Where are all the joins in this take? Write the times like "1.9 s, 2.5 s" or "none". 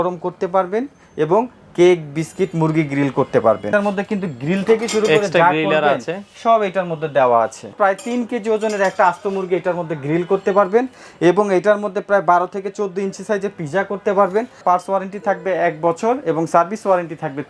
3.7 s, 7.7 s, 14.6 s